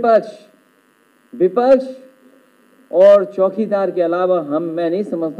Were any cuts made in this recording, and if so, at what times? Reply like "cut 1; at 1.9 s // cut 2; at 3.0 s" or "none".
none